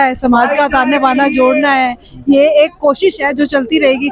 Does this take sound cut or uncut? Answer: uncut